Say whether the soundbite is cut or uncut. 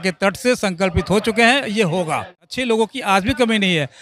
cut